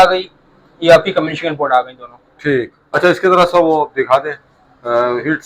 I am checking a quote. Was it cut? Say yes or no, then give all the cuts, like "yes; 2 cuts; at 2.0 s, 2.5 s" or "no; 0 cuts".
no; 0 cuts